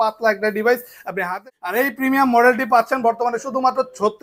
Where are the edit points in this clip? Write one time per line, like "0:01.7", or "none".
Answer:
0:01.4